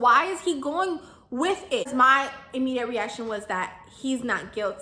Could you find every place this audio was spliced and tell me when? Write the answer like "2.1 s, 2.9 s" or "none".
1.9 s